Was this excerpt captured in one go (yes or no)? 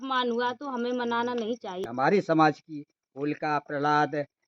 no